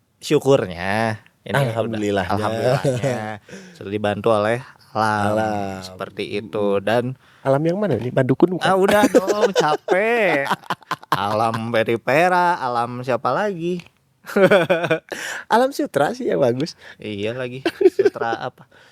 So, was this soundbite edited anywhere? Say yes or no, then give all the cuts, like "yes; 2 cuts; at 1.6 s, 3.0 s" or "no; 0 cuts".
no; 0 cuts